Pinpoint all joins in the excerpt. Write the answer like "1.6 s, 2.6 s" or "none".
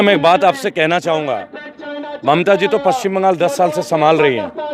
none